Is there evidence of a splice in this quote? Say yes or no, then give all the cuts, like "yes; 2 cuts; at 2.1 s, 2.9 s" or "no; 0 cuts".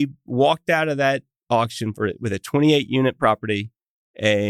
yes; 1 cut; at 1.3 s